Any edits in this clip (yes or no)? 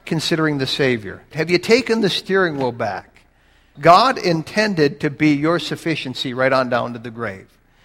yes